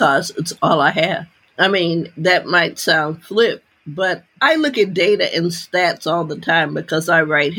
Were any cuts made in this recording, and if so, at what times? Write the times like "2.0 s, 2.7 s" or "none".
1.4 s, 4.3 s

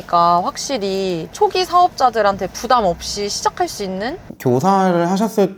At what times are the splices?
4.2 s

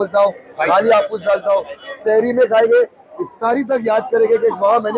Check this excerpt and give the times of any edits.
none

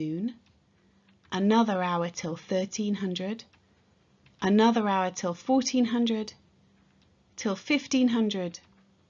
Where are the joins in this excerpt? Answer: none

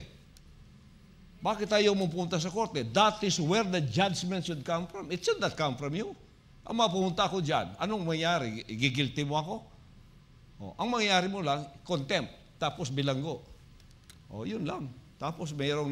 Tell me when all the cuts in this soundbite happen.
none

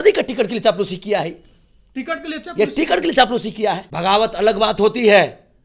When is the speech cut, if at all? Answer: 3.9 s

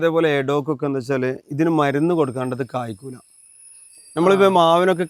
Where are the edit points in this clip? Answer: none

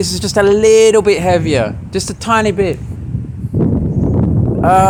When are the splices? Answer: none

